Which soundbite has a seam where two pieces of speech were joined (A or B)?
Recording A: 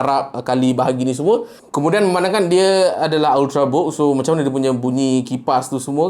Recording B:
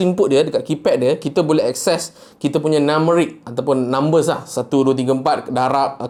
A